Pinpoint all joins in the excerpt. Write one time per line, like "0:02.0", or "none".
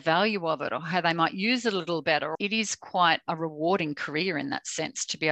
0:02.3